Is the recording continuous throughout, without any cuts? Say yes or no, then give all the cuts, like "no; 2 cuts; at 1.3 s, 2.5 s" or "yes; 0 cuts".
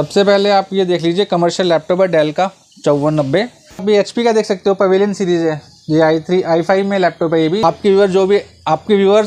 no; 2 cuts; at 3.8 s, 7.6 s